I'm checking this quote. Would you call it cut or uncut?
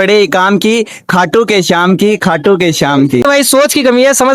cut